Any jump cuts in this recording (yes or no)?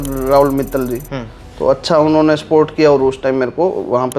no